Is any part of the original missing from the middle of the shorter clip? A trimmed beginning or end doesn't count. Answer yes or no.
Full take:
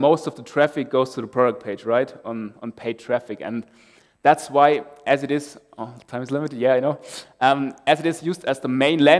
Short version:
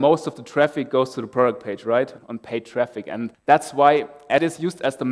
yes